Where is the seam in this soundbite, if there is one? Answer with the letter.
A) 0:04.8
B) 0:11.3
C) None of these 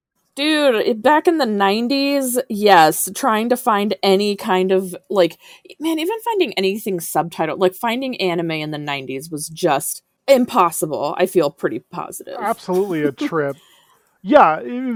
C